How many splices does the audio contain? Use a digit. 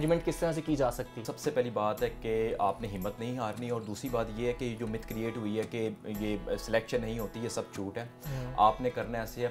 0